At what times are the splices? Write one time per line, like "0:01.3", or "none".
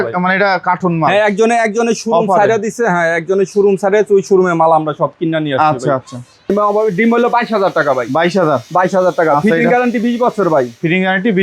0:06.5